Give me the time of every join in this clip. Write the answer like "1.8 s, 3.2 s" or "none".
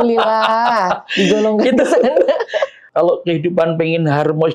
2.8 s